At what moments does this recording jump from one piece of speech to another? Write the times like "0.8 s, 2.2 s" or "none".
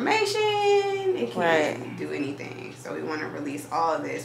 none